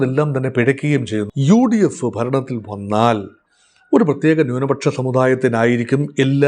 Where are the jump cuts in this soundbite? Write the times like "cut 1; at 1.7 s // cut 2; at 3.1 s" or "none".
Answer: cut 1; at 1.2 s